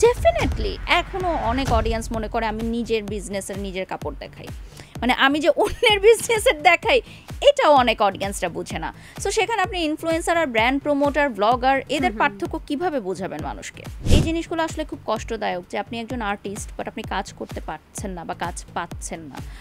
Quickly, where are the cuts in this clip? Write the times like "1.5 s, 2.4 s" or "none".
0.8 s, 13.9 s